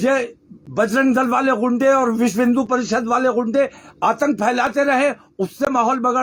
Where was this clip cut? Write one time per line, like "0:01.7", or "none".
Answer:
none